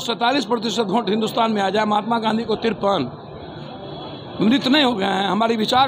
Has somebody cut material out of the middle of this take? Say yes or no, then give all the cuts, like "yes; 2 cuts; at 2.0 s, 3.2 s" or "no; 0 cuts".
no; 0 cuts